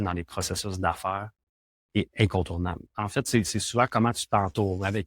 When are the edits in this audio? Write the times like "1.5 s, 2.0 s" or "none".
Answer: 2.9 s